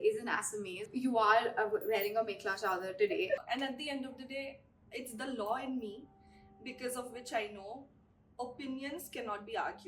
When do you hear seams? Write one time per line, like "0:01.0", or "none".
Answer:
0:00.9
0:03.4